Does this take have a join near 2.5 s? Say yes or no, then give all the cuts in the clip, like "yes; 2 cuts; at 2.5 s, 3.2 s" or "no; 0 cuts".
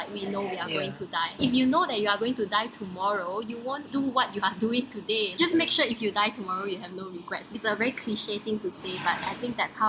no; 4 cuts; at 1.3 s, 3.8 s, 5.3 s, 7.4 s